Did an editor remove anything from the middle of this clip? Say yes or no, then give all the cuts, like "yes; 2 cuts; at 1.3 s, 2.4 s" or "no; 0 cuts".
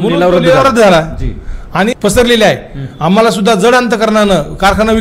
yes; 1 cut; at 2.0 s